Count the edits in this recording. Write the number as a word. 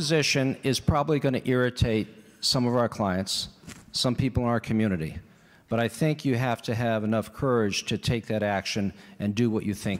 zero